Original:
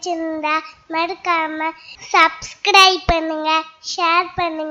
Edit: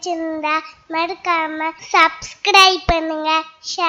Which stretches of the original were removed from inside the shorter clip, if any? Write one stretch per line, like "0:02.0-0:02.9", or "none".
0:01.8-0:02.0